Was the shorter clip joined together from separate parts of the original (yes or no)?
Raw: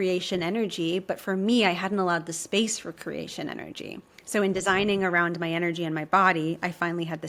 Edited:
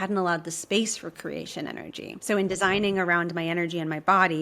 yes